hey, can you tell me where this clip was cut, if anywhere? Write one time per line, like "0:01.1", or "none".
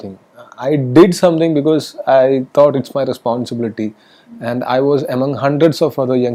none